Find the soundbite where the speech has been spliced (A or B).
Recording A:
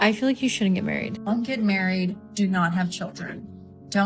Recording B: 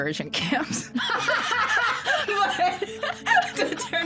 A